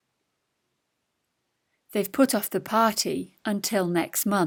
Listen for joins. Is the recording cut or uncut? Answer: uncut